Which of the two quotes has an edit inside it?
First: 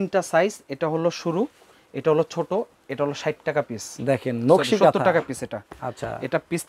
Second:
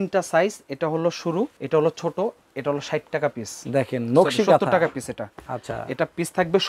second; 1 cut; at 1.6 s

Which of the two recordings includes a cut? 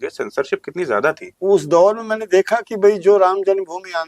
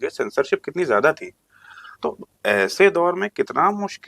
first; 1 cut; at 1.3 s

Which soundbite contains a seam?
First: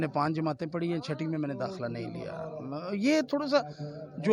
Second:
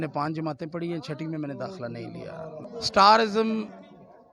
second; 1 cut; at 2.6 s

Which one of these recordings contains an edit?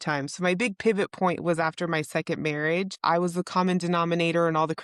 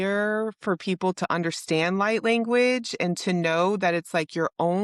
first; 1 cut; at 2.9 s

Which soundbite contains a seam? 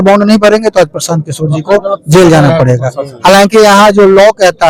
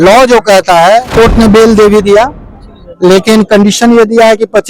second; 1 cut; at 1.1 s

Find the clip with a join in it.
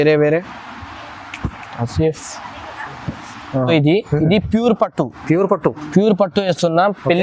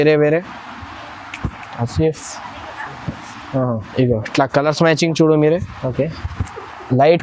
first; 1 cut; at 3.7 s

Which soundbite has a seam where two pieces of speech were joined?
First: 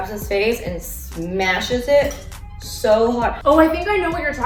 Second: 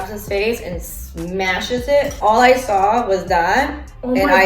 second; 1 cut; at 2.1 s

